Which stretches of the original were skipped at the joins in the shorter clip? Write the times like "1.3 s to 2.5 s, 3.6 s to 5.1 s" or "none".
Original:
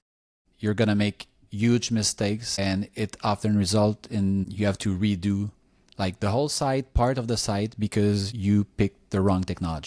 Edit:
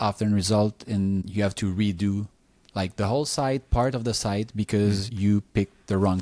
none